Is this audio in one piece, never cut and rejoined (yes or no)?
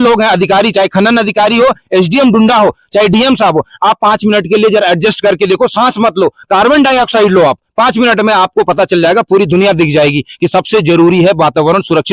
yes